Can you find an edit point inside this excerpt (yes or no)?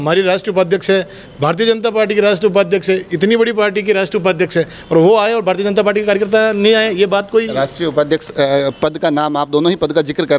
no